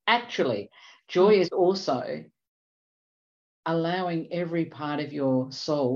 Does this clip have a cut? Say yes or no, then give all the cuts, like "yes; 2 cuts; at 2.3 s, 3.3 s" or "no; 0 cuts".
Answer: no; 0 cuts